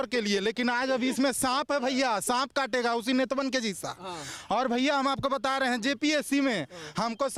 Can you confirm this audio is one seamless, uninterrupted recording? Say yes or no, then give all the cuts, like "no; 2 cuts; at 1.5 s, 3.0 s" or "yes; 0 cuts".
yes; 0 cuts